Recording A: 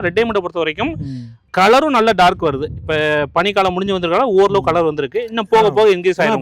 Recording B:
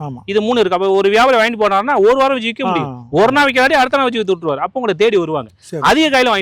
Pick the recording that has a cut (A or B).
A